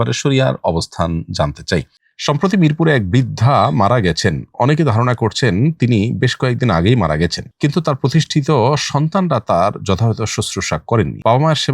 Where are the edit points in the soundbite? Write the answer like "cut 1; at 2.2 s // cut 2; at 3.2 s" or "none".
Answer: cut 1; at 1.9 s